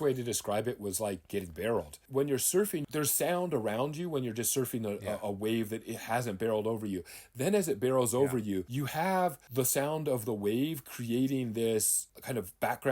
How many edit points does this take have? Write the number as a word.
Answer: two